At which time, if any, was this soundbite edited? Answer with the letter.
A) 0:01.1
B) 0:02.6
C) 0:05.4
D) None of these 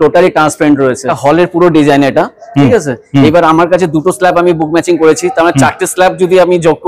A